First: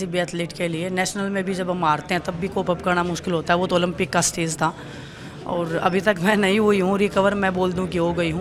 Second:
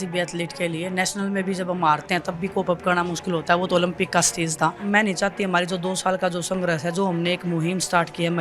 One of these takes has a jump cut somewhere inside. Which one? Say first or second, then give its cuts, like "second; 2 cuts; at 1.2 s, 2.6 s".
second; 1 cut; at 4.8 s